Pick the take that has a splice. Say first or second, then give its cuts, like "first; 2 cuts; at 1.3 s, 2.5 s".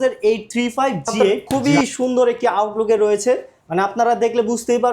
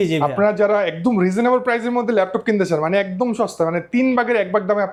first; 1 cut; at 1.4 s